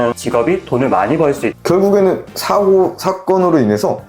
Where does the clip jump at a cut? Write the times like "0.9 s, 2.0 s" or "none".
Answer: 1.5 s